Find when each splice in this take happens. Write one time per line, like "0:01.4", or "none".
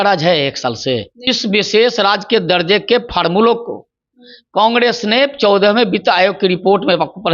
0:01.1